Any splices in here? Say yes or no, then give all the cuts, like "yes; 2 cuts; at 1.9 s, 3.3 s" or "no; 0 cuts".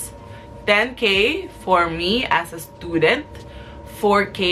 no; 0 cuts